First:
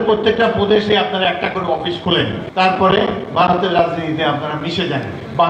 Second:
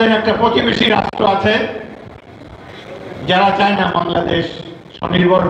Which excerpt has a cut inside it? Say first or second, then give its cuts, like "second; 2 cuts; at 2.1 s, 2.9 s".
first; 1 cut; at 2.4 s